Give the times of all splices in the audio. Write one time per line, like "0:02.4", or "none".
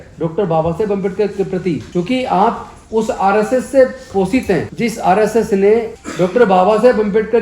0:01.8
0:04.7
0:06.0